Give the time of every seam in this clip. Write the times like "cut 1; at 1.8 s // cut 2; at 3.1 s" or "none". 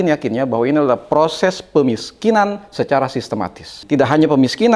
cut 1; at 3.7 s